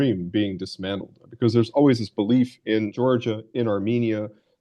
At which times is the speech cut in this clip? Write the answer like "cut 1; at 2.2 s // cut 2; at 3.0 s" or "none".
cut 1; at 2.9 s